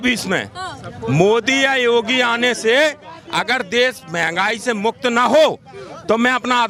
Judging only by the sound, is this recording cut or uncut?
uncut